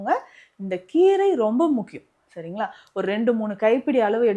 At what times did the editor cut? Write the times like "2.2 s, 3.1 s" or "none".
none